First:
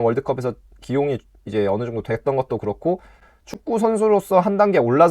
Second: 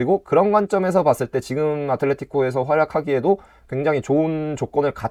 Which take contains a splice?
first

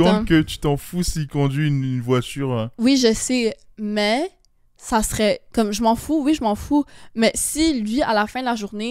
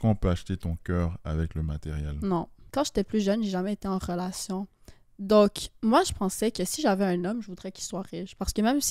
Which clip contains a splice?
second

